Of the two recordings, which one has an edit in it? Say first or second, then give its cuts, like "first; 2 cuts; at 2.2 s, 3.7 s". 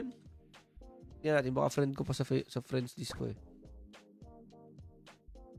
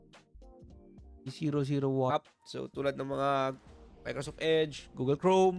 second; 1 cut; at 2.1 s